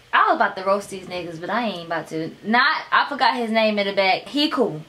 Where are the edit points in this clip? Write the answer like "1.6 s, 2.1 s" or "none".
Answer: none